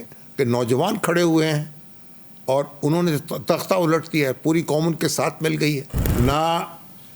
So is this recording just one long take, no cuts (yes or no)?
no